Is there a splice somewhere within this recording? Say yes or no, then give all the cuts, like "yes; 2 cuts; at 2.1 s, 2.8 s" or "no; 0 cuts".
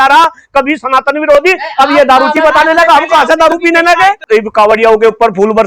yes; 1 cut; at 4.2 s